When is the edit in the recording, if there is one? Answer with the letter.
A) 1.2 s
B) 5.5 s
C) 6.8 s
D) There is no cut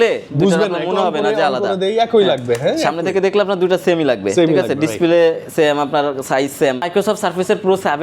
C